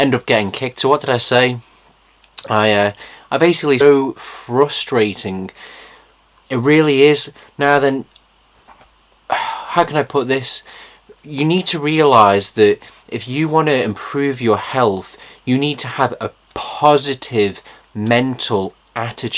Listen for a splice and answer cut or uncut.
uncut